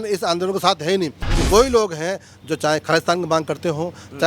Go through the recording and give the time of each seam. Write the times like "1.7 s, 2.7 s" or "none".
1.2 s